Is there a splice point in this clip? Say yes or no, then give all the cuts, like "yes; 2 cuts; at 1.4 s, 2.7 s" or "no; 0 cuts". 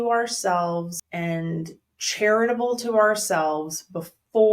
yes; 1 cut; at 1.0 s